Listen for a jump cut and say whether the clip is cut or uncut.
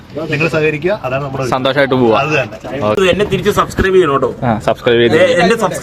cut